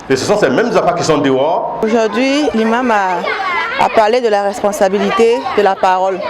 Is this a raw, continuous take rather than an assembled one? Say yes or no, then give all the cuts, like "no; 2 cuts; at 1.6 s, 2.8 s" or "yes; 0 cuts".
no; 1 cut; at 1.7 s